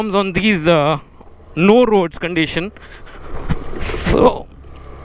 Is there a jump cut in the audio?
no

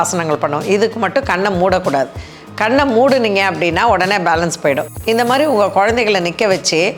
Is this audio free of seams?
no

